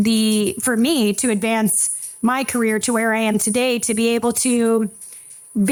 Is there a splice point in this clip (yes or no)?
no